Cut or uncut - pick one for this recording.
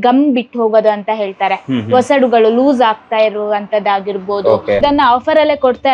cut